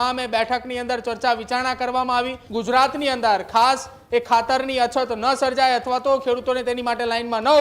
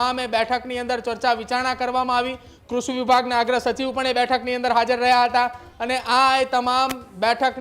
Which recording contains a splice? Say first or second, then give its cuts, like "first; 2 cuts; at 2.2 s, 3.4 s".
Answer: first; 1 cut; at 2.4 s